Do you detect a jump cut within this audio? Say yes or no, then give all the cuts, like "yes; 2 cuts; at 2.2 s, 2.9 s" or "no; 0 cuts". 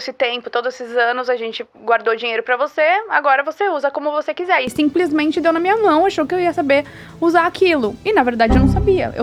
no; 0 cuts